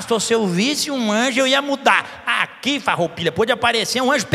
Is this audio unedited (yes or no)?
yes